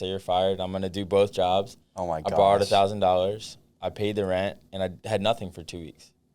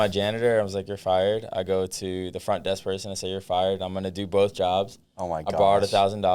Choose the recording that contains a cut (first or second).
first